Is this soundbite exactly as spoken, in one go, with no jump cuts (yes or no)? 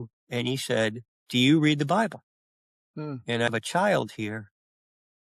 no